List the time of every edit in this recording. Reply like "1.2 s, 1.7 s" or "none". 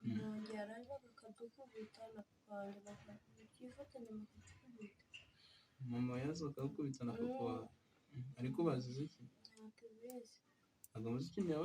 none